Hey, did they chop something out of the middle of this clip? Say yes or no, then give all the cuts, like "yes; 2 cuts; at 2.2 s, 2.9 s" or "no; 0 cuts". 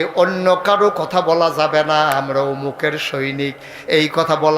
no; 0 cuts